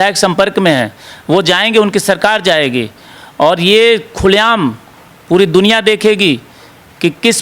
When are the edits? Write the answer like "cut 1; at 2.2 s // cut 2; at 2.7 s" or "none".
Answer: none